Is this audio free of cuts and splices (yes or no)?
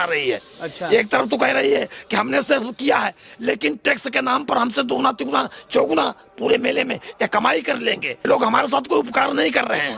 no